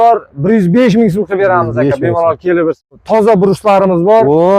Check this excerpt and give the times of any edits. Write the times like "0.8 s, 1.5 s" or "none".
2.8 s